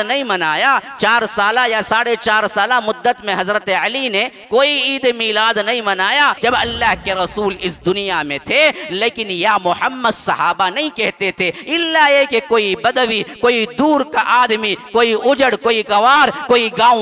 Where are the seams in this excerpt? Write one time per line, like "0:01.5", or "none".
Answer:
0:06.4

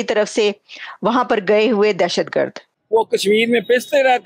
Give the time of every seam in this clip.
0:02.7

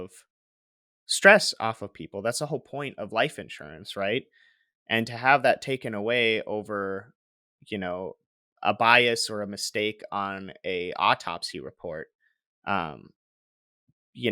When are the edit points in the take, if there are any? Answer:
none

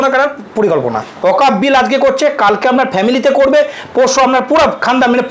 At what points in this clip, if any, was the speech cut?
0:01.1

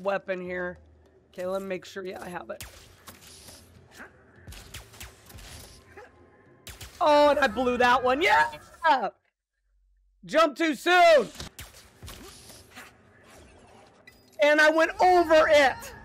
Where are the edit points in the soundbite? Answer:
0:11.5

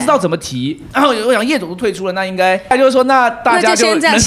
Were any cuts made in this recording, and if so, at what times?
0:00.8
0:02.7

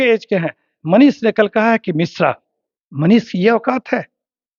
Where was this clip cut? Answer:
none

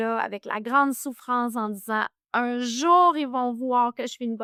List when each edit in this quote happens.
none

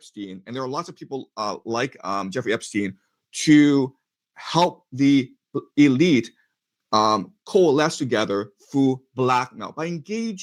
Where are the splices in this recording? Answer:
none

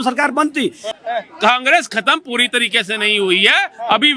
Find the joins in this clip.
0:00.9

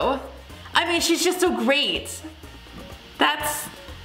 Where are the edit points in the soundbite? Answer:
none

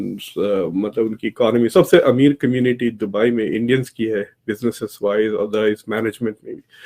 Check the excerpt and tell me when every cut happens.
none

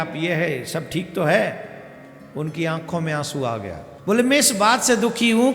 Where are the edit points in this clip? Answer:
0:03.9

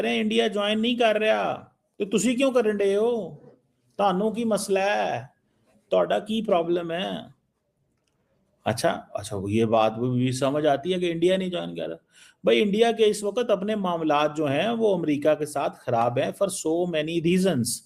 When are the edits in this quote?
none

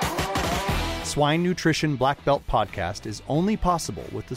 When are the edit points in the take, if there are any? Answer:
0:00.9

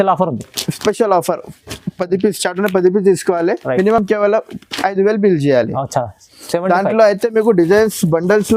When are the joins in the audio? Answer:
none

